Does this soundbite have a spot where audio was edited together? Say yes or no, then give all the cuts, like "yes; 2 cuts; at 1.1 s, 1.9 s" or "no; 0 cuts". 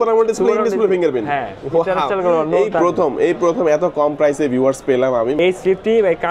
yes; 1 cut; at 5.4 s